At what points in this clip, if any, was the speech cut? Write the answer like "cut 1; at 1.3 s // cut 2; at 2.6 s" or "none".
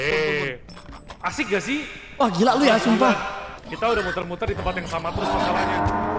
cut 1; at 3.6 s